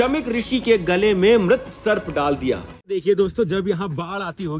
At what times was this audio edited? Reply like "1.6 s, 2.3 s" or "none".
3.0 s

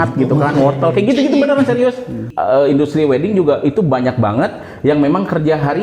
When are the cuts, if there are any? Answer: 2.3 s

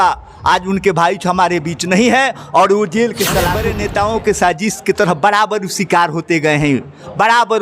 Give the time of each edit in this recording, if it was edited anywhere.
3.6 s

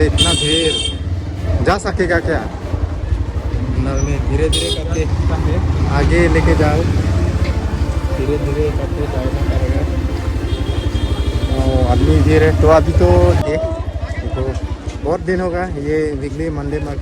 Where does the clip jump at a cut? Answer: 13.4 s

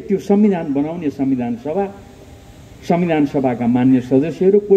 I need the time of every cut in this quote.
none

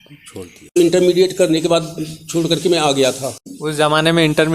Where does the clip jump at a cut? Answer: 0.8 s, 3.5 s

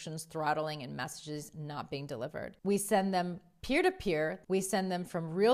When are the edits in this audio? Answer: 2.5 s, 4.4 s

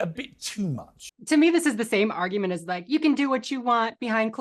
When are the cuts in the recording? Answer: 1.0 s

